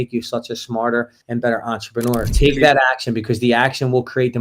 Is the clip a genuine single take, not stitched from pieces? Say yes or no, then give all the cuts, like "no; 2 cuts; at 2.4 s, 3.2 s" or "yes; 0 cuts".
no; 1 cut; at 2.3 s